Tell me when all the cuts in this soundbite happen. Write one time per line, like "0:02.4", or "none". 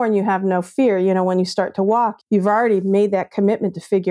0:02.2